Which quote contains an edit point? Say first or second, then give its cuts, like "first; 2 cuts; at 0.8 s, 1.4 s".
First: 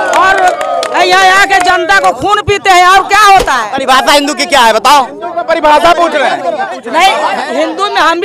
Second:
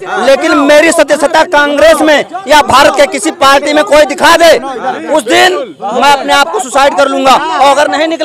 first; 2 cuts; at 3.7 s, 6.8 s